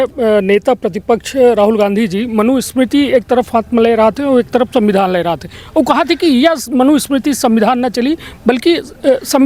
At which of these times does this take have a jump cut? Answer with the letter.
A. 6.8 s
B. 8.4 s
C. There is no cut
C